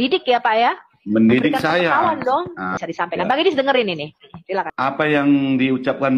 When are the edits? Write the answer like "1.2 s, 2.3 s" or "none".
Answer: 2.7 s, 4.7 s